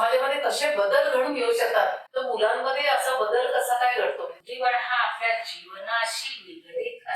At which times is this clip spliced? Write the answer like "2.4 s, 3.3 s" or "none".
2.1 s, 4.4 s